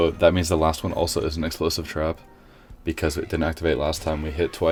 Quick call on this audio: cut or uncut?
uncut